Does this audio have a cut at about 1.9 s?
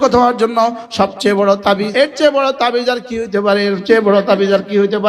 yes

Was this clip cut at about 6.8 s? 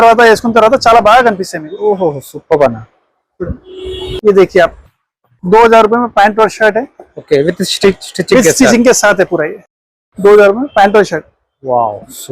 no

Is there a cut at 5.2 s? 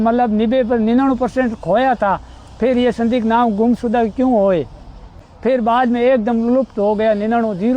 yes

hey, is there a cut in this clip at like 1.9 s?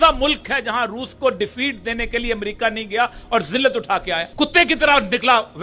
no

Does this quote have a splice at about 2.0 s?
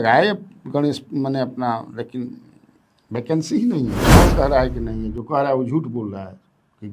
no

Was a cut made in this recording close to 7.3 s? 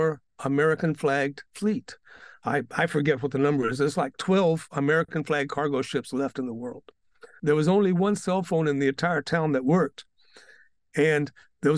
yes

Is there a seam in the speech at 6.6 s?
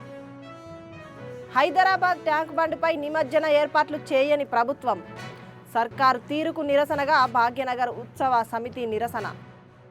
no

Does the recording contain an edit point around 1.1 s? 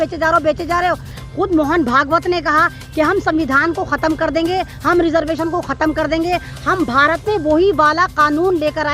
yes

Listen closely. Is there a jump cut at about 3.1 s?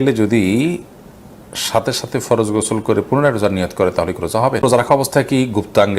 no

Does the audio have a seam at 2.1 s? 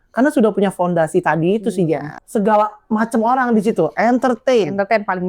yes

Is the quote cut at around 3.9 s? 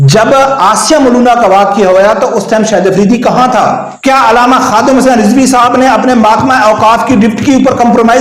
yes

